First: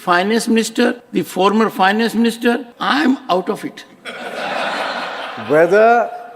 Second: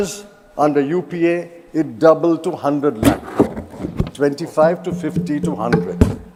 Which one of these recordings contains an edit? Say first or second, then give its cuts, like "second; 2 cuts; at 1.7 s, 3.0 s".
first; 2 cuts; at 1.0 s, 2.7 s